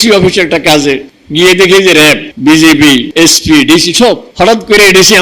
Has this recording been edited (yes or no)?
yes